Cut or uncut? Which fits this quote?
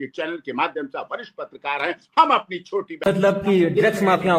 cut